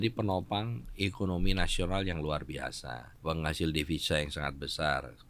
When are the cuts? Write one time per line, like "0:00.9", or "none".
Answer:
0:03.0